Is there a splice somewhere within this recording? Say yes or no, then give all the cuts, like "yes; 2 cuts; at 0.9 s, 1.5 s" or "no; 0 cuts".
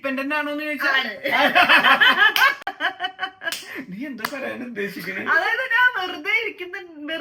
no; 0 cuts